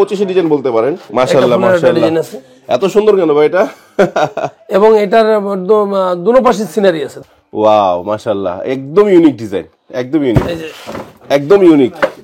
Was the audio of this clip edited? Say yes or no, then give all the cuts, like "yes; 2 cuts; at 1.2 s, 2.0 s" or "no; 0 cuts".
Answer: yes; 2 cuts; at 1.0 s, 7.1 s